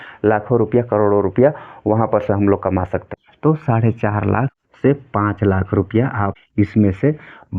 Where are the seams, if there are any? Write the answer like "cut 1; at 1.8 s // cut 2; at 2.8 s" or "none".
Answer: cut 1; at 3.0 s // cut 2; at 4.6 s // cut 3; at 6.4 s